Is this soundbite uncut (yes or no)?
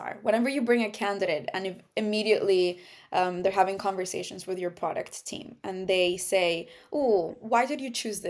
yes